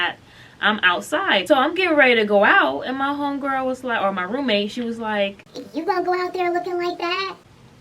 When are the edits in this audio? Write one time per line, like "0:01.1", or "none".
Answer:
0:01.4